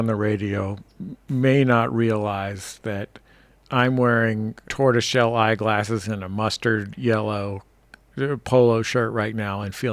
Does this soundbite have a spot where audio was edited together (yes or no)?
yes